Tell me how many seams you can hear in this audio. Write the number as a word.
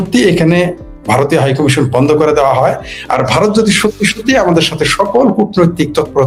zero